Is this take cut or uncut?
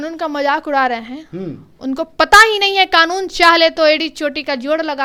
uncut